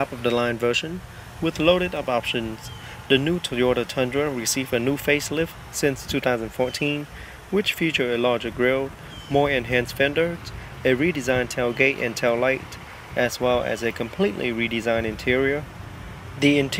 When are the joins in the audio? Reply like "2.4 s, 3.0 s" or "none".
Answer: 0.9 s